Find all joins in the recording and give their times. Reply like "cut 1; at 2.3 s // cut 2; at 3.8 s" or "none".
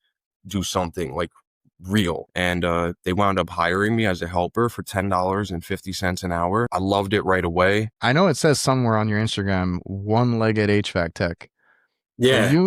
cut 1; at 2.3 s // cut 2; at 6.7 s // cut 3; at 7.9 s